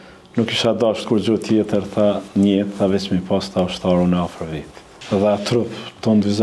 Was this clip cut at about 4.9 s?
yes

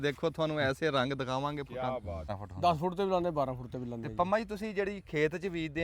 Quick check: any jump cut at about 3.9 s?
no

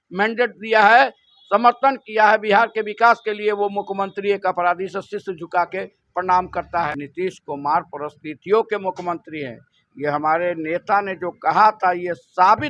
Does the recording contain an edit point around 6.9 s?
yes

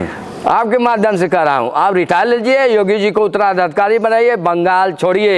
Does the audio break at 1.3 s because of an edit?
no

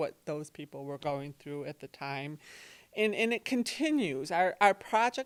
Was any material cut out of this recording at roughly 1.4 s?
no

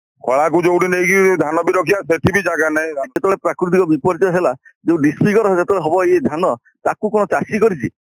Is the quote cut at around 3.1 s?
yes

